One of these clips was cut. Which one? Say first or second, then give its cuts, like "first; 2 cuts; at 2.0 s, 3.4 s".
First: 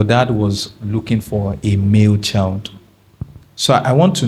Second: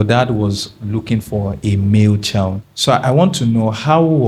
second; 1 cut; at 2.7 s